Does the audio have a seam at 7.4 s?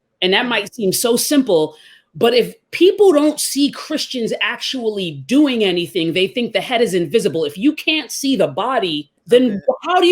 no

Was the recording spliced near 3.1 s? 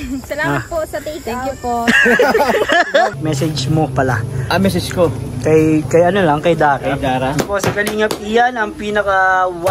yes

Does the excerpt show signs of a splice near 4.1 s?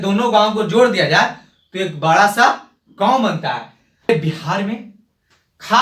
yes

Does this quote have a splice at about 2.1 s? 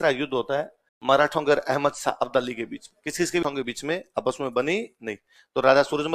no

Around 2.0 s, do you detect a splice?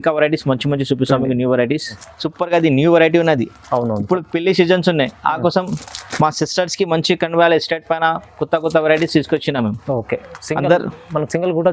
yes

